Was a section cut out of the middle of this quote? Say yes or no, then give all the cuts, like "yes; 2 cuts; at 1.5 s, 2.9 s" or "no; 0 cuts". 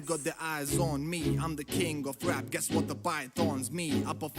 no; 0 cuts